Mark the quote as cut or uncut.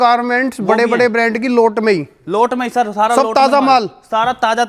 uncut